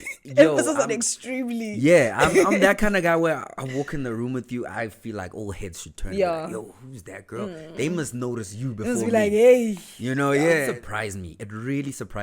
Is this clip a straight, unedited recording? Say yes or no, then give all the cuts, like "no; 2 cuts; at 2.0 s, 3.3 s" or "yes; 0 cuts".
no; 1 cut; at 10.7 s